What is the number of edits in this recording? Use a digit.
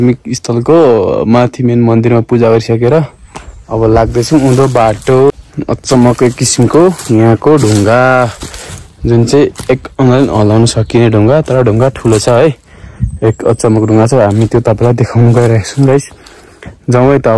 1